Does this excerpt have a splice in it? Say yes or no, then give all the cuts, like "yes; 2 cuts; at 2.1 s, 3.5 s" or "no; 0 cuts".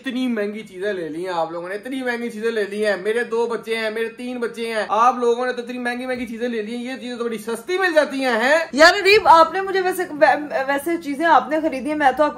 no; 0 cuts